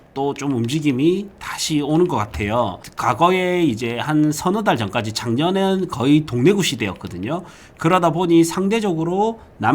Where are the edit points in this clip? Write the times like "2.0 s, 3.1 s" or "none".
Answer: 2.9 s